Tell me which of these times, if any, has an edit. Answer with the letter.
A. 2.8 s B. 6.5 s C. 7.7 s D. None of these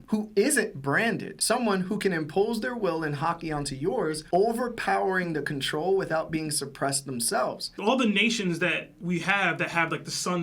C